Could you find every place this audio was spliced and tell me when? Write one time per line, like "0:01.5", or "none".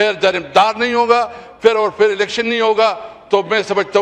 none